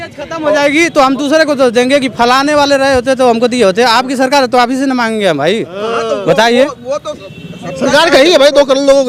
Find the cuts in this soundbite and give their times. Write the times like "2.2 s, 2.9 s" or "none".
none